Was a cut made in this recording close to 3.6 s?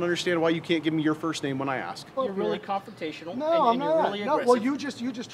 no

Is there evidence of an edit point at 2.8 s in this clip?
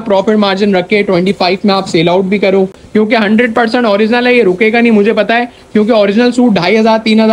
yes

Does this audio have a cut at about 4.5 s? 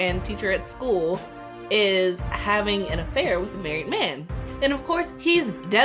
yes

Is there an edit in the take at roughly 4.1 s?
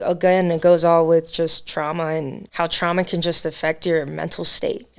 no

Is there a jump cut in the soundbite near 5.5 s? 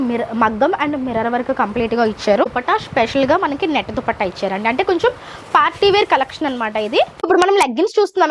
no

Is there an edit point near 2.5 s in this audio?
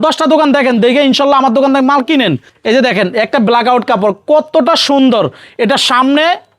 yes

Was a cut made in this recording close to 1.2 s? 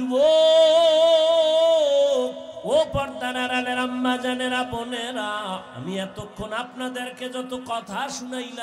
no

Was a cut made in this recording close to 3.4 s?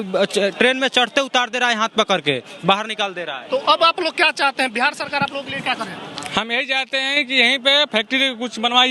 no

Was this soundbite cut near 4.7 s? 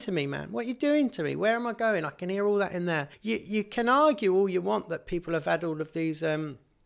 no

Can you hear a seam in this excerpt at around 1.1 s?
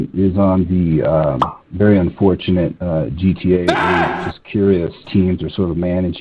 no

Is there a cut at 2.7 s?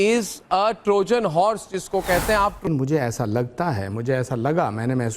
yes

